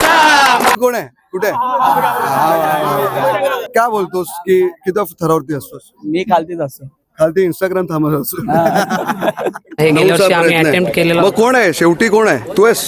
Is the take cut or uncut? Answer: cut